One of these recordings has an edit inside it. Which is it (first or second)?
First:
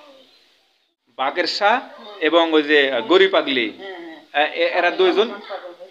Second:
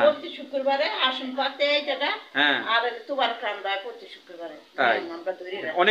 first